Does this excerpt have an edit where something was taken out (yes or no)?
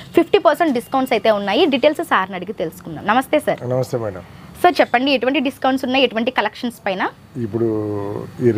no